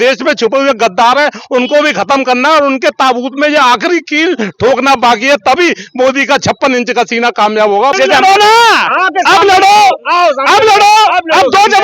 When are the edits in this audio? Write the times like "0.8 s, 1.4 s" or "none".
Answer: 8.0 s